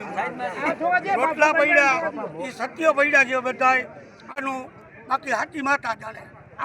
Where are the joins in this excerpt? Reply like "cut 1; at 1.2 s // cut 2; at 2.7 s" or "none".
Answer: cut 1; at 4.4 s